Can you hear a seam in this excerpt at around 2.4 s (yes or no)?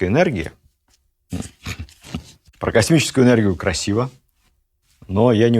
yes